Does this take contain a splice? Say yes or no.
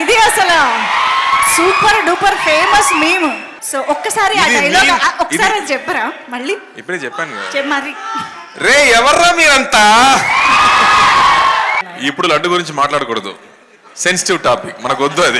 yes